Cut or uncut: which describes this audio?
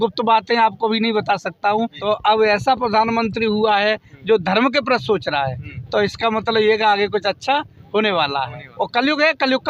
cut